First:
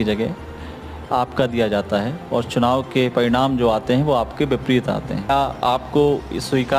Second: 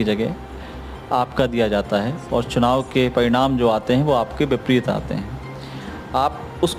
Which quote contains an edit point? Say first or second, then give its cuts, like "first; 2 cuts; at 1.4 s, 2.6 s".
first; 1 cut; at 5.3 s